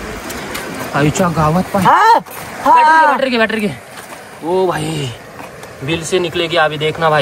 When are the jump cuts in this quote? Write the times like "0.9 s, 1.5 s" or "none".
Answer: none